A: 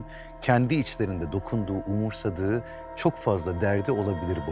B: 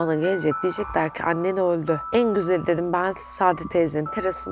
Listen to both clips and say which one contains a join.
B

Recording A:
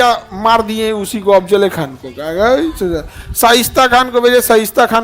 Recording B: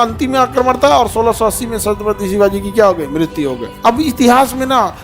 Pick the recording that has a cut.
B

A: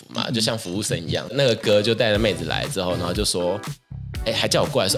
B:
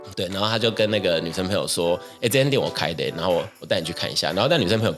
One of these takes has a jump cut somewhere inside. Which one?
A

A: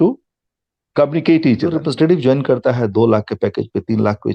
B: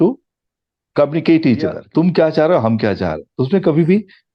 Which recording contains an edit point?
A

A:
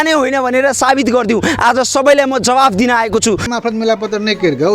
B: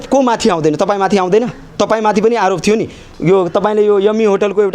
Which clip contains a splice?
A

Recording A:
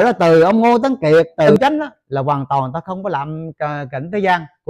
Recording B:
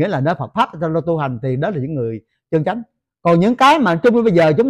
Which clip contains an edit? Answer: A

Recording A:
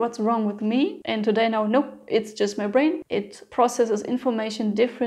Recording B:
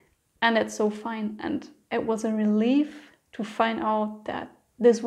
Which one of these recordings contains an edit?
A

